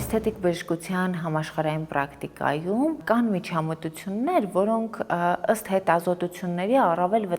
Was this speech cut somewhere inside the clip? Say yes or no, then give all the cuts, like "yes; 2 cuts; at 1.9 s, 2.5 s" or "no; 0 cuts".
yes; 1 cut; at 3.0 s